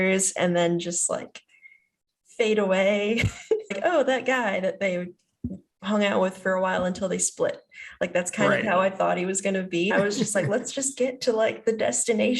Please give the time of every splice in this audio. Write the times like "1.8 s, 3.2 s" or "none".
3.8 s, 9.9 s